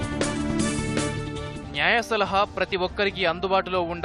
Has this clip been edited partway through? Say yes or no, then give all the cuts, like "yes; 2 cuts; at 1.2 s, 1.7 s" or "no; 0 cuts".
yes; 1 cut; at 1.2 s